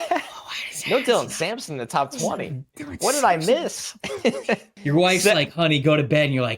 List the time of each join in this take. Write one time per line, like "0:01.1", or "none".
0:04.7